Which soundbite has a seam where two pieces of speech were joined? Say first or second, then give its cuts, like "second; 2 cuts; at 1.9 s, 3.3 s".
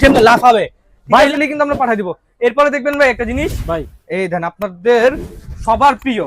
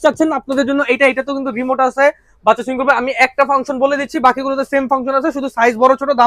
first; 1 cut; at 1.3 s